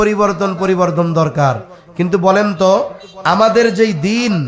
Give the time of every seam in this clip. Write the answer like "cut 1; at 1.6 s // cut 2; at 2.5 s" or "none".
none